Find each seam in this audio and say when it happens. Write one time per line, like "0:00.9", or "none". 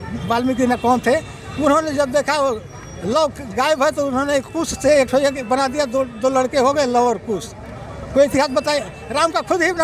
none